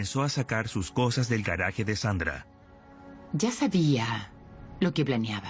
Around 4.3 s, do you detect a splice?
no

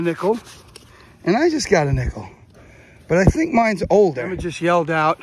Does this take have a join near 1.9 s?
no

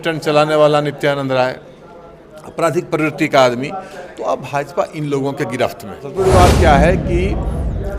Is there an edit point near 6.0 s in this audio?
yes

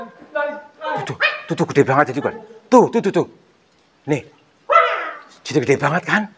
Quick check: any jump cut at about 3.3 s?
no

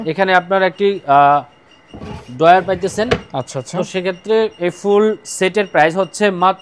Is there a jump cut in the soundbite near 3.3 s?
no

